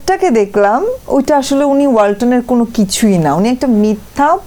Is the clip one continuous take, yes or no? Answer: yes